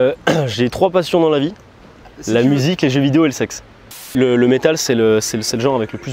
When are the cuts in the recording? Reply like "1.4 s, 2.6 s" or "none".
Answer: 4.1 s